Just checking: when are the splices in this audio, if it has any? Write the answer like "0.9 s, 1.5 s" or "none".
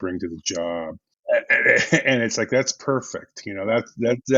1.2 s